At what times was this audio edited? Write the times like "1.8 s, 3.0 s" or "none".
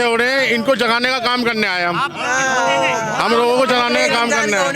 none